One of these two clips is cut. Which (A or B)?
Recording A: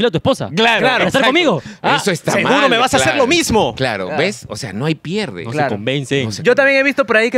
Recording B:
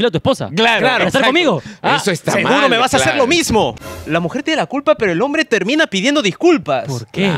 B